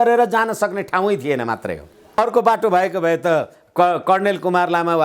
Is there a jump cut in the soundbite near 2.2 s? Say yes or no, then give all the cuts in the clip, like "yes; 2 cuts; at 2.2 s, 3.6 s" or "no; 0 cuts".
yes; 1 cut; at 2.2 s